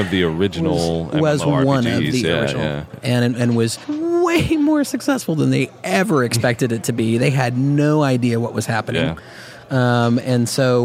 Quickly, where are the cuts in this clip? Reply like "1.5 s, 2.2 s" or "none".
2.9 s, 3.8 s